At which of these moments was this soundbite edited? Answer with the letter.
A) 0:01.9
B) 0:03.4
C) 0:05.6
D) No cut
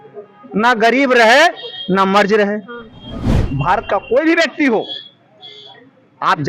B